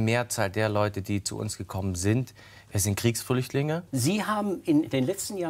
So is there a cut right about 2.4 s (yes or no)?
no